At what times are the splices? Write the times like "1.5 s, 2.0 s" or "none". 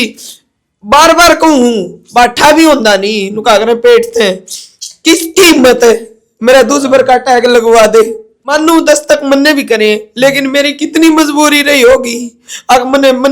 8.4 s